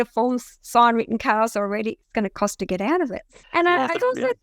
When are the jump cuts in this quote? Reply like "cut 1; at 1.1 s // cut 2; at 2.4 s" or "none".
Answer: cut 1; at 3.4 s